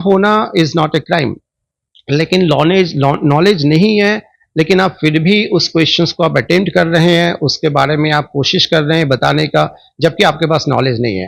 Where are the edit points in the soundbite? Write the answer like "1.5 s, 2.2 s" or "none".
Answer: none

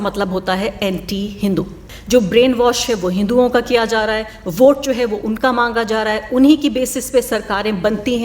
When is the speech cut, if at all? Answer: 1.9 s

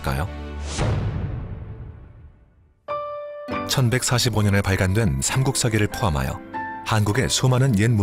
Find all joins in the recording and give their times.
none

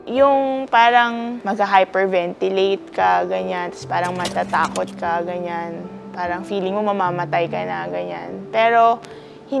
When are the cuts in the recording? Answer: 1.3 s

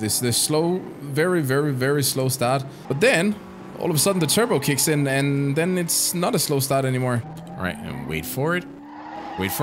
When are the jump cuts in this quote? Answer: 2.8 s, 7.3 s

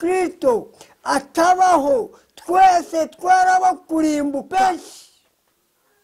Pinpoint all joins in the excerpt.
4.5 s

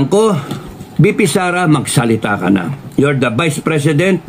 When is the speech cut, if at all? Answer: none

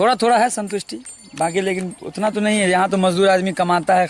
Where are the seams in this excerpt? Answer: none

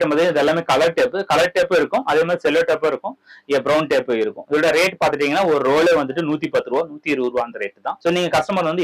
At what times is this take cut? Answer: 7.9 s

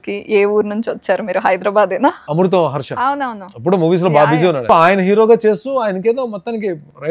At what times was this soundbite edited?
2.2 s, 4.7 s

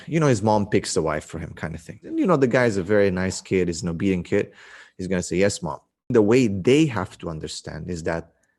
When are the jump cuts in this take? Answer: 2.0 s, 6.1 s

